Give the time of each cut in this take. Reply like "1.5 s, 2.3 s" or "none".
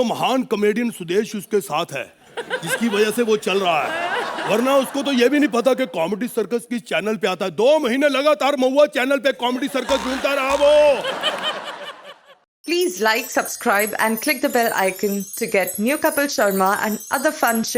12.0 s

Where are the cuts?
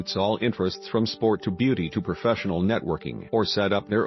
3.1 s

